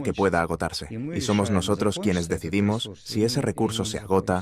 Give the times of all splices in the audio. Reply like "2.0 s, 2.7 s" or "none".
1.1 s